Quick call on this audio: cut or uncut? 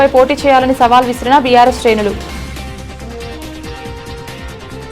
cut